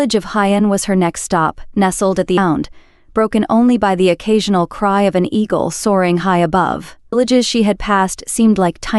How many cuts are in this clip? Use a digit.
2